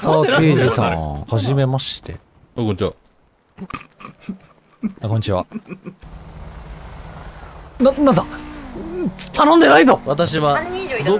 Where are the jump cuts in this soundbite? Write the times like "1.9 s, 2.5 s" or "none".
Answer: 5.9 s, 7.8 s, 10.0 s